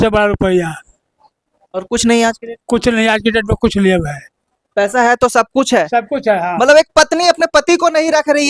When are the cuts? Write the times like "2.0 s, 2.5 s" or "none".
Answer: none